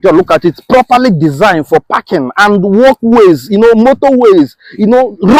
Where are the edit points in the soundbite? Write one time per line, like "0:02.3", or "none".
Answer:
none